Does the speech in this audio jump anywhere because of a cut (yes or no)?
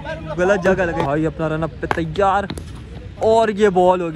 yes